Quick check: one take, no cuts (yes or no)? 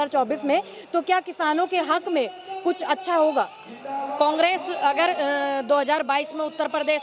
yes